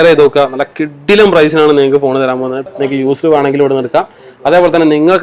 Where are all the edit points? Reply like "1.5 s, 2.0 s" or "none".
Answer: 2.6 s